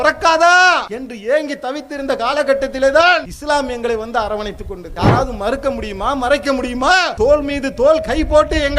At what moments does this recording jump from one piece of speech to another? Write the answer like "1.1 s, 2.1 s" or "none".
1.0 s, 3.3 s, 4.8 s, 7.1 s